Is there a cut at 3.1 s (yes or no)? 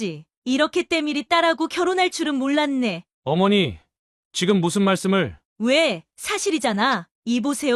no